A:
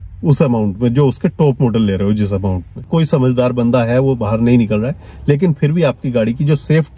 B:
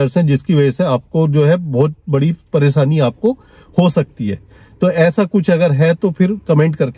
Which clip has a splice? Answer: A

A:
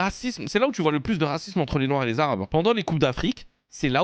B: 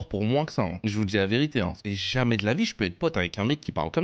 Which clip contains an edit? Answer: B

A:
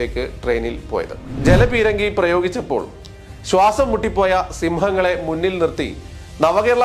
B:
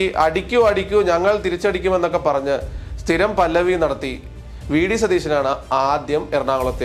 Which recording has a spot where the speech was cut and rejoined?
A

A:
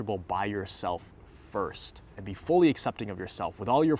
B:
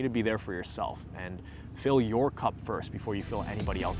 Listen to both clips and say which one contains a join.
A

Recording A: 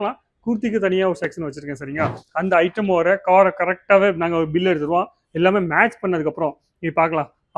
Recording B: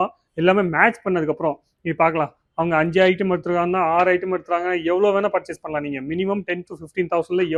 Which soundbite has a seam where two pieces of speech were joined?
A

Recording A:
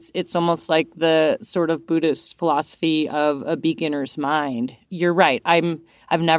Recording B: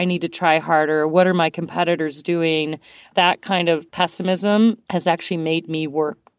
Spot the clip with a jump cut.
B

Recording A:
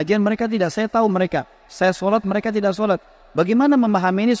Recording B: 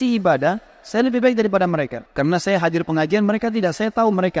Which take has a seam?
B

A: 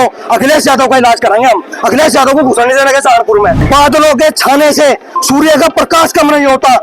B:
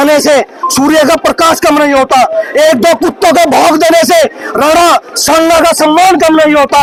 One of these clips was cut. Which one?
A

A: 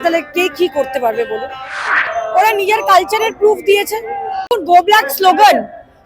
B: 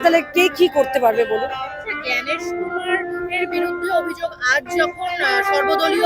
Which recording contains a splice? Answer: A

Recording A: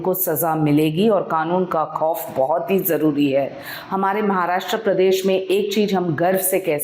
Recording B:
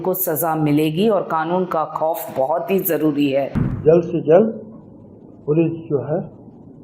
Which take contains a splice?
B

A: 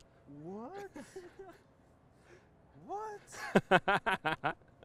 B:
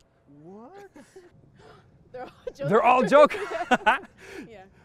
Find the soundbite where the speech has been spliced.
B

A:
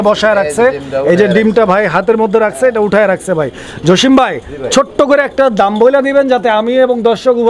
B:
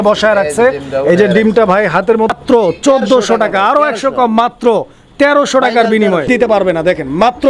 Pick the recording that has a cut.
B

